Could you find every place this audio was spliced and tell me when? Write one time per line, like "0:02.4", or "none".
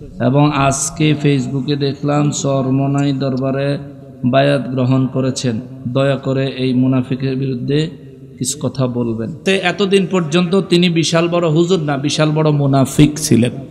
0:09.4